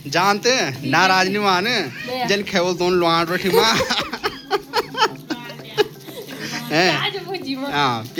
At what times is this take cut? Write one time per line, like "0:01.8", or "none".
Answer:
none